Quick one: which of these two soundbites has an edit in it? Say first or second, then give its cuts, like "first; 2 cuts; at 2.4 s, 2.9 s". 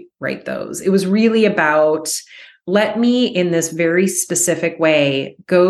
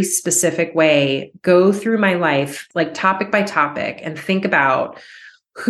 second; 1 cut; at 2.6 s